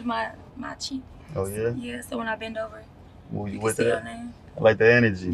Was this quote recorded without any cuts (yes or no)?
yes